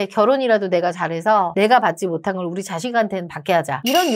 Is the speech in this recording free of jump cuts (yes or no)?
yes